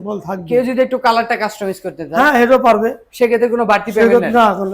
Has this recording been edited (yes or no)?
no